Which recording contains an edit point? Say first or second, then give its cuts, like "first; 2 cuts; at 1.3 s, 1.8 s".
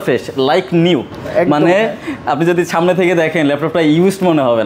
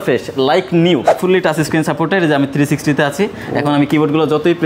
second; 1 cut; at 1.1 s